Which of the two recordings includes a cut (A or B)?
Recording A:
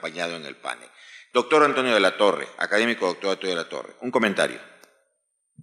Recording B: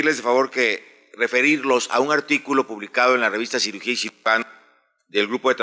B